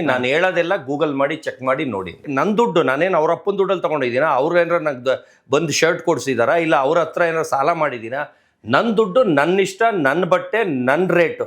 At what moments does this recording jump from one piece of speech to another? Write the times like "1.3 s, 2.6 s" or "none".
2.2 s